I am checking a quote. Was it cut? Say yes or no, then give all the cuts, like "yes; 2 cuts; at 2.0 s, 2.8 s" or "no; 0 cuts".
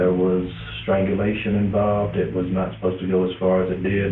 yes; 1 cut; at 2.1 s